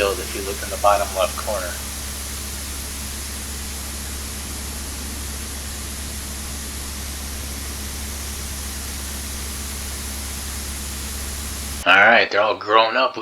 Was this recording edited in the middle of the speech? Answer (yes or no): yes